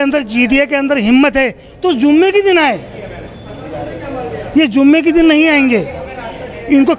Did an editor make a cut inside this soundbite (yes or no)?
no